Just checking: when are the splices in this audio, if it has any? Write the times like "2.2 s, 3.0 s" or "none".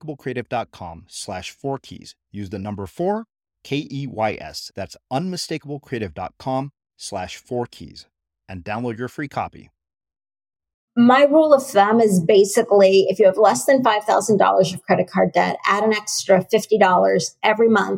10.9 s